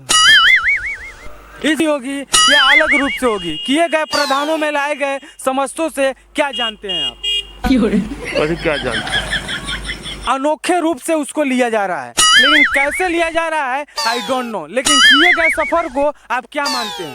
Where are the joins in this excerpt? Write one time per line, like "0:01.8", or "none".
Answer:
0:01.8
0:10.2